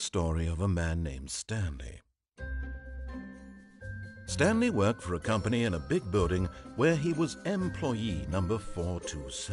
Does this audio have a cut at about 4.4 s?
yes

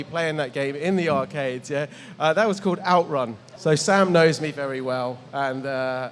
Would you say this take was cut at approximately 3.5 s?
yes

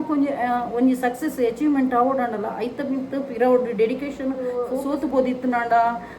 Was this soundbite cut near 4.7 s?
yes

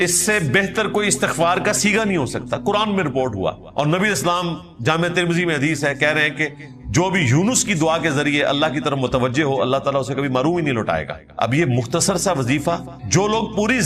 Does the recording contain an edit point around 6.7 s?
no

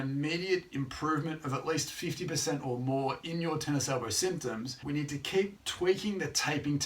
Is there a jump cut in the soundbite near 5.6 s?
yes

